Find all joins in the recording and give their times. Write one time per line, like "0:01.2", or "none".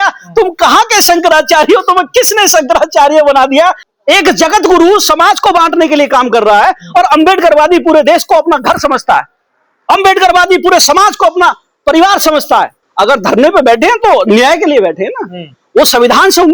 0:03.9
0:12.8